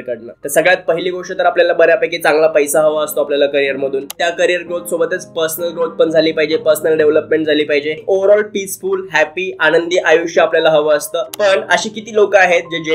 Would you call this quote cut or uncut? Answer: cut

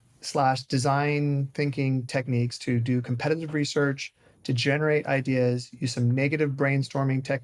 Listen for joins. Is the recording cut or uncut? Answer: uncut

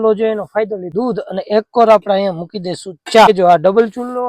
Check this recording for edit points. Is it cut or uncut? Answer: cut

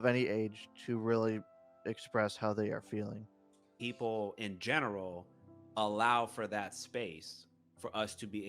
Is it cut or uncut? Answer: cut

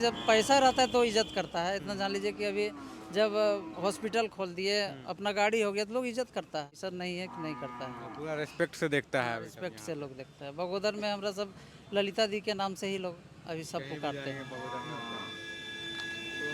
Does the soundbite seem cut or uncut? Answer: uncut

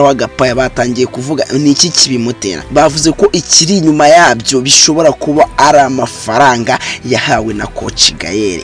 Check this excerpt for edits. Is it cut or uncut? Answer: cut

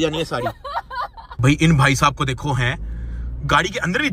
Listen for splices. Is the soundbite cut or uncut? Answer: cut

